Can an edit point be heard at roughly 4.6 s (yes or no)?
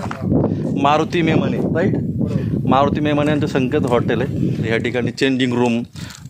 yes